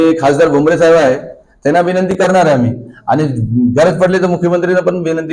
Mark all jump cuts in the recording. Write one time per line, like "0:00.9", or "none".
none